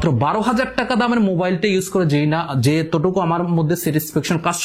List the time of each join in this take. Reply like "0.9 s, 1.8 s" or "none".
none

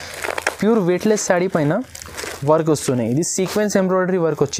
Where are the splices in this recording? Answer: none

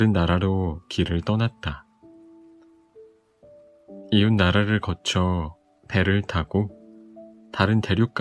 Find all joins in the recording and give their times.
2.3 s, 4.1 s

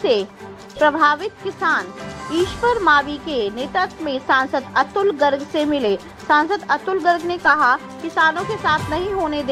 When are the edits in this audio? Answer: none

